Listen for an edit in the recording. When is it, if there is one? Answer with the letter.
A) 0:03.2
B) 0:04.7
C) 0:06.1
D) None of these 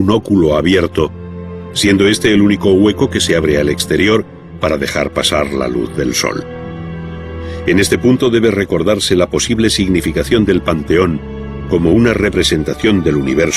A